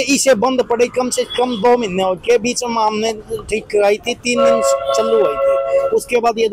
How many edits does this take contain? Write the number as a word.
zero